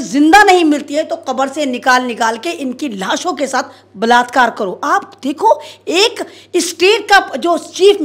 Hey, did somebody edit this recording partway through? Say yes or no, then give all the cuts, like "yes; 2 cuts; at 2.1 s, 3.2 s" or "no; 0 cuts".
no; 0 cuts